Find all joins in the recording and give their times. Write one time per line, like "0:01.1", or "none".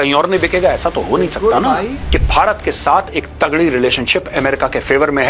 0:02.0